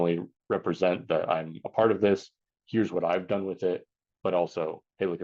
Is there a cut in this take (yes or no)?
no